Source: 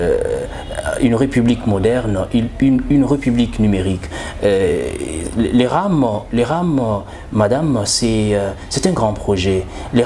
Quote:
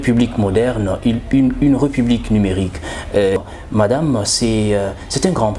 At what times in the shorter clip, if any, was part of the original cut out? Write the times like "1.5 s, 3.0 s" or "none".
3.4 s